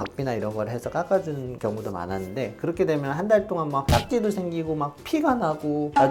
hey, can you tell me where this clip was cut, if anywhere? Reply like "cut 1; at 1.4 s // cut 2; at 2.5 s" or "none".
none